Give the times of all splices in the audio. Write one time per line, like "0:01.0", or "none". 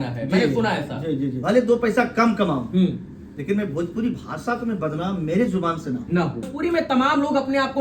0:01.4
0:06.5